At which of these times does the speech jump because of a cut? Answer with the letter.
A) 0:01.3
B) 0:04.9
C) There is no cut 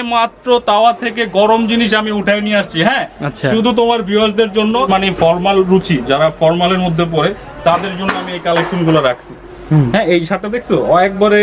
B